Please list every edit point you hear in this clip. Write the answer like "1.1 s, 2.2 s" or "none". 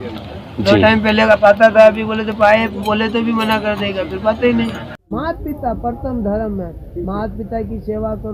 5.0 s